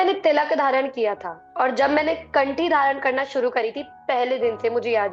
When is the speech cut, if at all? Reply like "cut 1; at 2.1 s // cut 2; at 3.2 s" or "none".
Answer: none